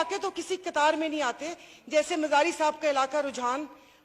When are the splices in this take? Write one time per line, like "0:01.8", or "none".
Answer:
none